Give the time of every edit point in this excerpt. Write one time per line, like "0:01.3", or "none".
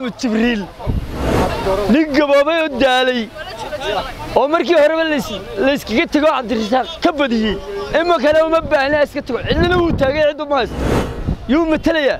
0:01.3